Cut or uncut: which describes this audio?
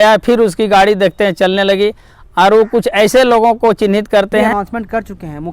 cut